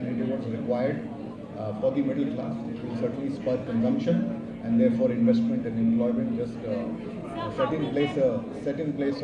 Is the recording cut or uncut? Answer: uncut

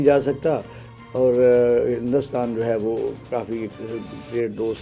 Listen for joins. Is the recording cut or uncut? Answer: uncut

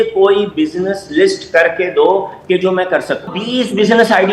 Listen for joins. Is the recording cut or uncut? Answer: cut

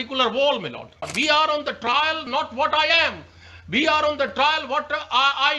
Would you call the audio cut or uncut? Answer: cut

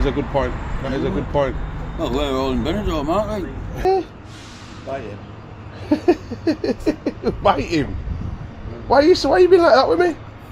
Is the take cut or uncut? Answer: cut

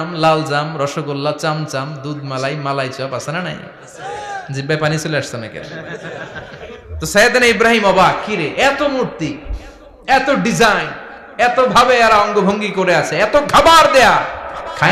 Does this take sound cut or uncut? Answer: uncut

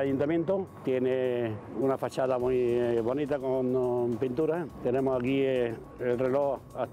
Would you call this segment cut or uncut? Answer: uncut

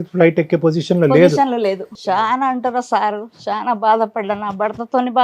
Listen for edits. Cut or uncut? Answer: cut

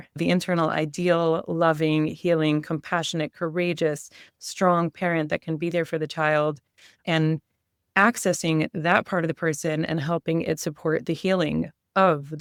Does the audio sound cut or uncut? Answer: uncut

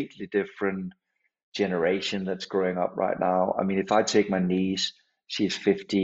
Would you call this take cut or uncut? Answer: uncut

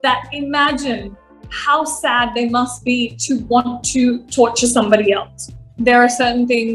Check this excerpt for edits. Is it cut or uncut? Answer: cut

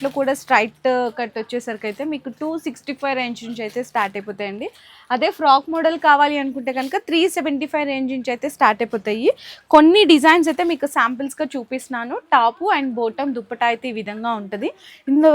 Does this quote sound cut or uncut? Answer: uncut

